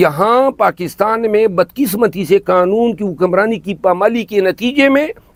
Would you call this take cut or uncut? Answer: uncut